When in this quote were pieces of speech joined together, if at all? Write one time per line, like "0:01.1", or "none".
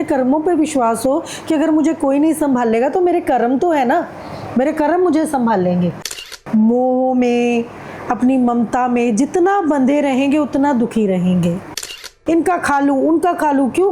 0:06.1
0:12.1